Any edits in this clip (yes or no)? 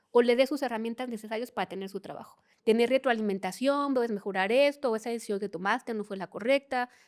yes